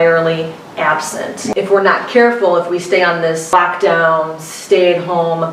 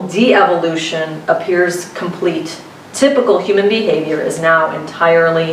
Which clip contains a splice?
first; 2 cuts; at 1.5 s, 3.5 s

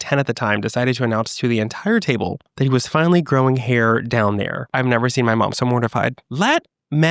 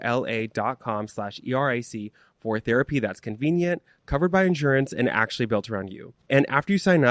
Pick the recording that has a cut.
first; 2 cuts; at 4.6 s, 6.2 s

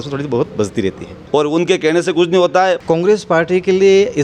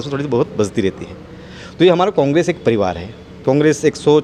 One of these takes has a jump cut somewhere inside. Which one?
first; 2 cuts; at 1.1 s, 2.8 s

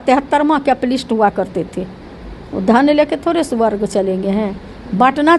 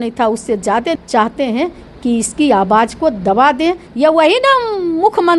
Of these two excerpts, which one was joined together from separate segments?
second; 2 cuts; at 0.9 s, 3.9 s

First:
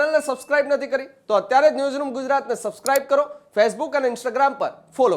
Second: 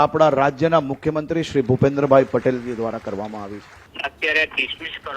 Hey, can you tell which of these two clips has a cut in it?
second; 1 cut; at 3.8 s

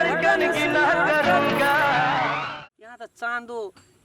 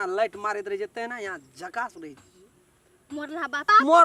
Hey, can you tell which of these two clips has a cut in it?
first; 1 cut; at 2.4 s

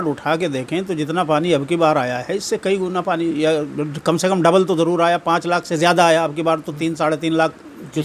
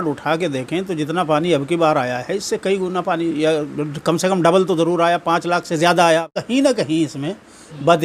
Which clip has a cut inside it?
second; 1 cut; at 6.3 s

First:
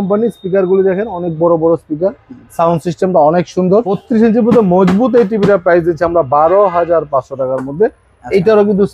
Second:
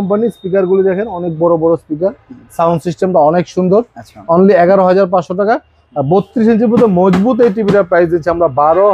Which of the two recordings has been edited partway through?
first; 1 cut; at 4.0 s

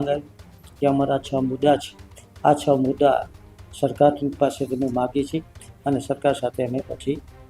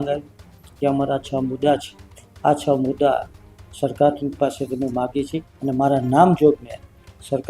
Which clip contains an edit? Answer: second; 1 cut; at 5.5 s

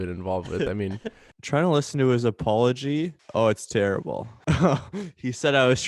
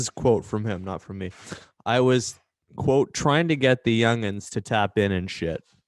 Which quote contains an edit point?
first; 2 cuts; at 1.3 s, 3.2 s

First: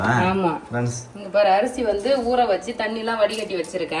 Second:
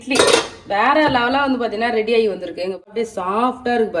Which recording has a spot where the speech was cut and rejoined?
second; 1 cut; at 2.9 s

